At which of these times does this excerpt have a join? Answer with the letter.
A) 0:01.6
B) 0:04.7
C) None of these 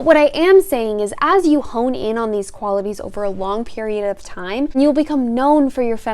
B